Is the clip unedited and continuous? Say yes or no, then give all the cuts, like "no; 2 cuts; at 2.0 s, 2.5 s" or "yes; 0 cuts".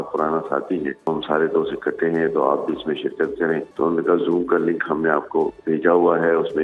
no; 2 cuts; at 1.1 s, 3.7 s